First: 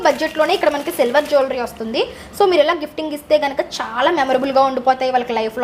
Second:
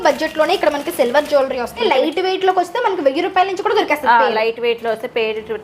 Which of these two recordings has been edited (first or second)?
second